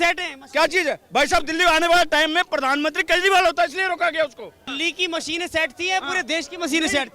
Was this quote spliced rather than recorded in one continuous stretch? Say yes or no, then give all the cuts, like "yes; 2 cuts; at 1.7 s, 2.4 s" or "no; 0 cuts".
yes; 1 cut; at 4.7 s